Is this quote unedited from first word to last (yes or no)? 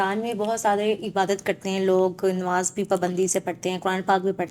yes